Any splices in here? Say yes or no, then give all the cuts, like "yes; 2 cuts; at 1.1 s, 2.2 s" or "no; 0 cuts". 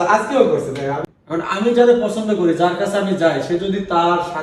yes; 1 cut; at 1.1 s